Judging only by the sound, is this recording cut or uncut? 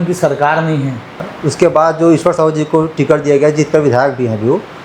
cut